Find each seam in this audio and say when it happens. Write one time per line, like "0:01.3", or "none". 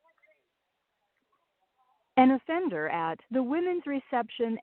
none